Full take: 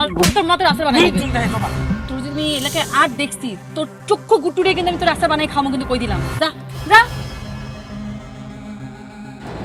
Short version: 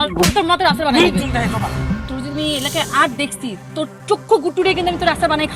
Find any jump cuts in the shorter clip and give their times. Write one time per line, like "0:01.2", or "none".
none